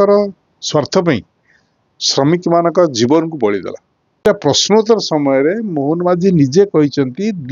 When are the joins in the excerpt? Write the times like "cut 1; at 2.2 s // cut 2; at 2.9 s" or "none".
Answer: cut 1; at 4.2 s